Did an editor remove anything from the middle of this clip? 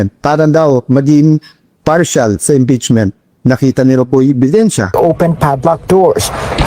yes; 1 cut; at 4.9 s

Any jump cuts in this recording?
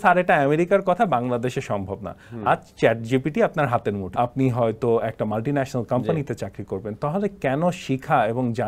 yes; 1 cut; at 4.0 s

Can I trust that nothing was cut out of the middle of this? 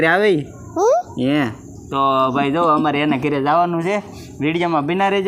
yes; 0 cuts

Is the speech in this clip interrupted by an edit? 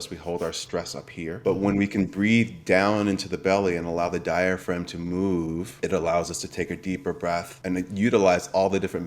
yes; 3 cuts; at 1.4 s, 5.7 s, 7.6 s

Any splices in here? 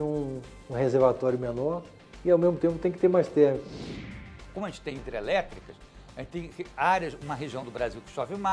yes; 1 cut; at 3.9 s

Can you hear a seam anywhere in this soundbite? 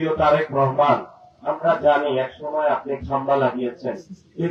no; 0 cuts

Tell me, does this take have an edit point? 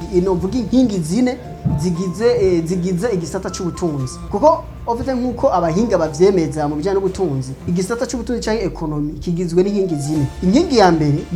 no; 0 cuts

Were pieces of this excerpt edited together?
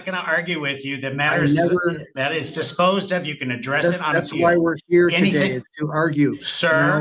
no; 0 cuts

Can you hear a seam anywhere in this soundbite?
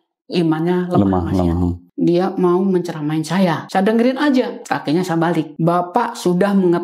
yes; 4 cuts; at 1.8 s, 3.6 s, 4.6 s, 5.5 s

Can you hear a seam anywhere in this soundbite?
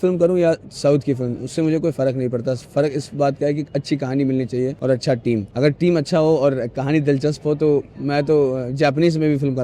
yes; 2 cuts; at 4.8 s, 5.5 s

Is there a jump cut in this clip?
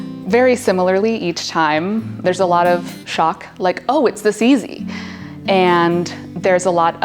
yes; 1 cut; at 2.5 s

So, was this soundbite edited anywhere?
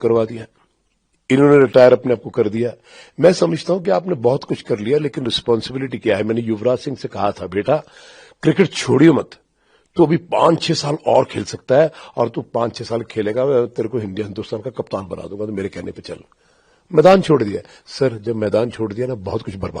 no; 0 cuts

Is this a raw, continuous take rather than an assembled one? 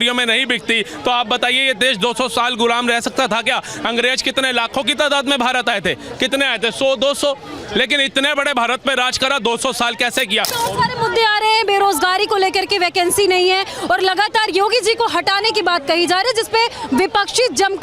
no; 1 cut; at 10.5 s

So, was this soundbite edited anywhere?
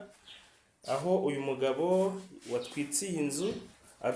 no; 0 cuts

